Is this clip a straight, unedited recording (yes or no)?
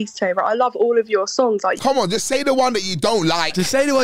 no